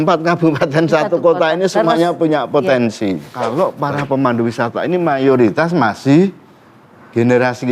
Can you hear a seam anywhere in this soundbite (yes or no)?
yes